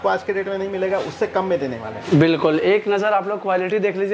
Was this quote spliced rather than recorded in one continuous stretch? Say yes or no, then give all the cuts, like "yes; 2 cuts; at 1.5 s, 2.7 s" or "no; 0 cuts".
yes; 1 cut; at 2.2 s